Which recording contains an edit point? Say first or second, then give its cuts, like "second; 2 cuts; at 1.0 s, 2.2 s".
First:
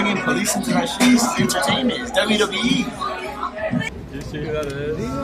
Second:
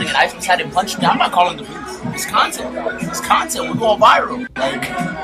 first; 1 cut; at 3.9 s